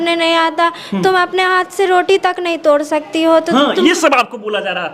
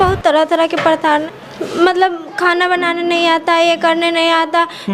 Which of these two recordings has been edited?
second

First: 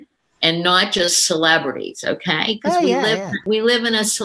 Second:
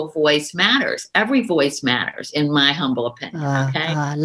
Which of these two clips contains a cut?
first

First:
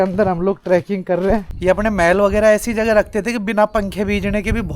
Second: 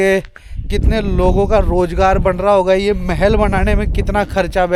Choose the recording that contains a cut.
first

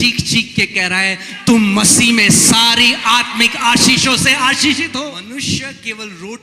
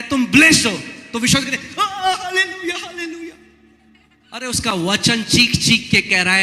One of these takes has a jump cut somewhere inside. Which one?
first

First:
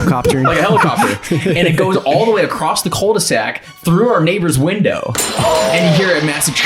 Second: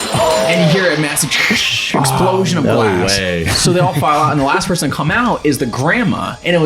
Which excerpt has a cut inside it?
second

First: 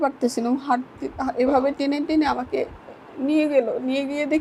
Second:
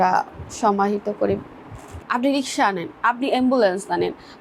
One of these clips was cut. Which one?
second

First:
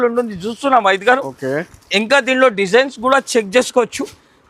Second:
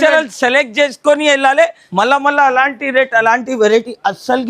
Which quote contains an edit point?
second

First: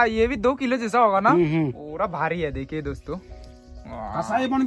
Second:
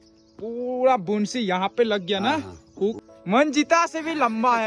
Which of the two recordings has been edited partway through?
second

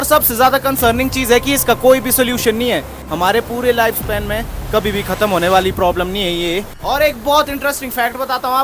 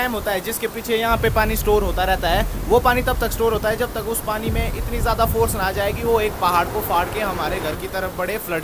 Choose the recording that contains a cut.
first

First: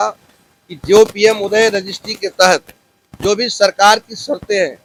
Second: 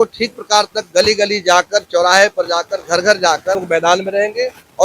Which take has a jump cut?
second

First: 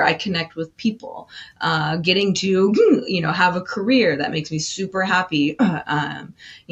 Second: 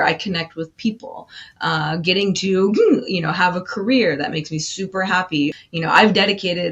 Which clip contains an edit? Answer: second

